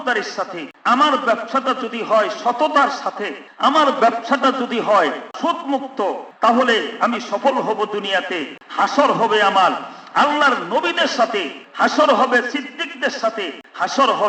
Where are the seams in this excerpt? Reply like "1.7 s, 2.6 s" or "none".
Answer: none